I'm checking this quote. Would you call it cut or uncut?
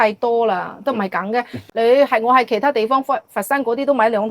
cut